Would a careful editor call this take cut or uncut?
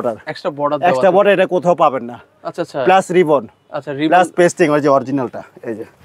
uncut